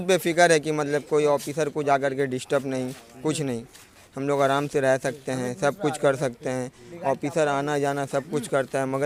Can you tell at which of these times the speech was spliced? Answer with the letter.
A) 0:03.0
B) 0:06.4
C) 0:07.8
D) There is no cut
D